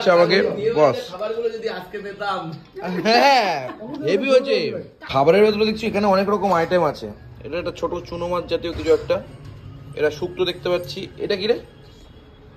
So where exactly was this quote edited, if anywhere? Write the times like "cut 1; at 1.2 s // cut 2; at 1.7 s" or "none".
cut 1; at 4.9 s